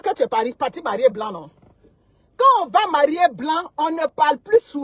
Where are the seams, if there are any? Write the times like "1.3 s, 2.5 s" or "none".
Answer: none